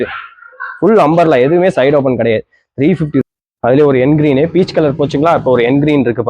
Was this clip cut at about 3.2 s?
yes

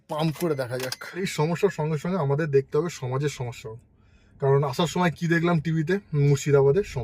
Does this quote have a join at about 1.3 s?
yes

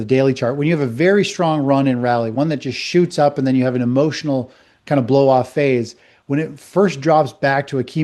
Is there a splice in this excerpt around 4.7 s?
no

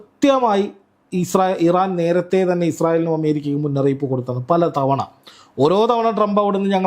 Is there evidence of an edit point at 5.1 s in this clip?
no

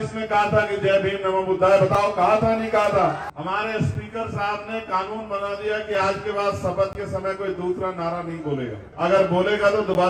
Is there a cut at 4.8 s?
no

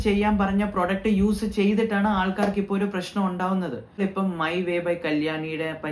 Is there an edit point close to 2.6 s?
no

